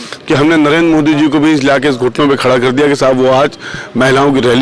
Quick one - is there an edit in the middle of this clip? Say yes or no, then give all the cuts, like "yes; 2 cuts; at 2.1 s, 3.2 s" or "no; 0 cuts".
no; 0 cuts